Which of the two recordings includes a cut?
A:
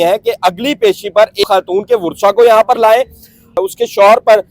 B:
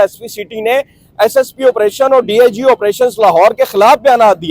A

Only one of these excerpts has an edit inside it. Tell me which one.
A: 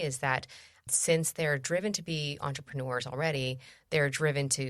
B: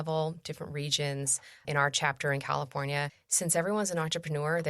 B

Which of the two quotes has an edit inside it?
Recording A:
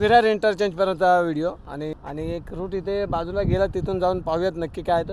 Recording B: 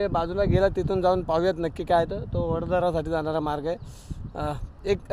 A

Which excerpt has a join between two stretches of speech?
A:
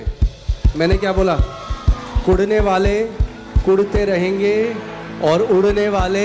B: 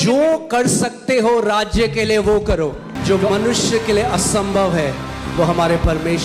B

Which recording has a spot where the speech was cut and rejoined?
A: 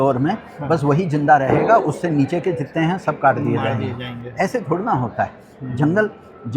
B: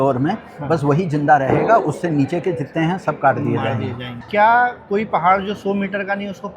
B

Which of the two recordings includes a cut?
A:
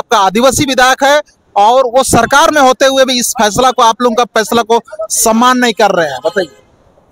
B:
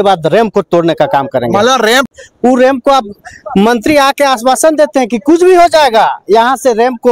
B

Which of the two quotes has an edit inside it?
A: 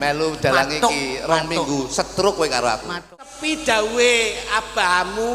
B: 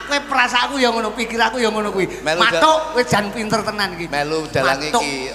A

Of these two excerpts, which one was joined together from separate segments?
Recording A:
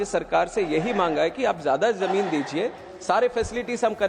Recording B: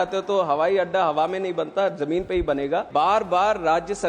B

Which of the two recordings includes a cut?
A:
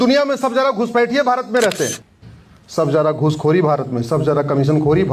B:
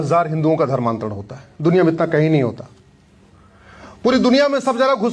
A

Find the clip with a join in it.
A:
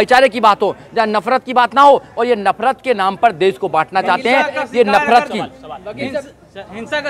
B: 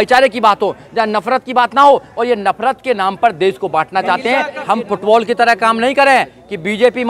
B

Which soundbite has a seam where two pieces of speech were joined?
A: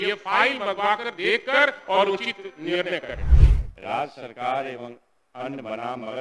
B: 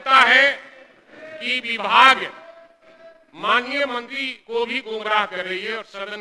A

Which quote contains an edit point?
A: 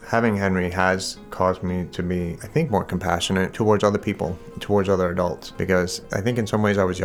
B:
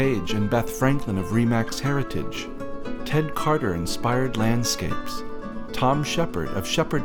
A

